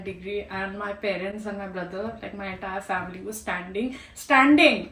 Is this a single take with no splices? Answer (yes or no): yes